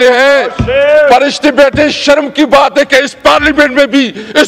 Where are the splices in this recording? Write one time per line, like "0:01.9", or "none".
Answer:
none